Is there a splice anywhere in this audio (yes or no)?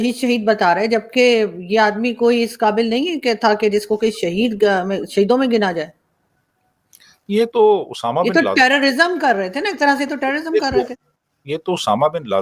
no